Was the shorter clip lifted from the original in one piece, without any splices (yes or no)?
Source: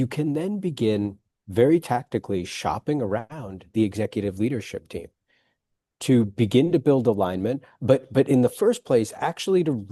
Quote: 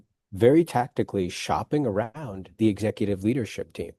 yes